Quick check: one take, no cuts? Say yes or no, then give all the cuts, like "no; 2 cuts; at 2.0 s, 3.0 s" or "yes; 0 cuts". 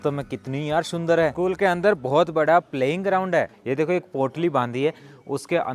no; 1 cut; at 3.5 s